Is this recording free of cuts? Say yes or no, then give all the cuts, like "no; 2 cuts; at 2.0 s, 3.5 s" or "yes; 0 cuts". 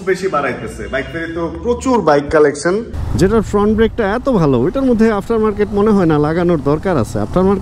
no; 1 cut; at 3.0 s